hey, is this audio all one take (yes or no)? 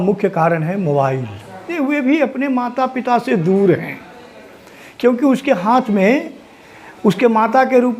no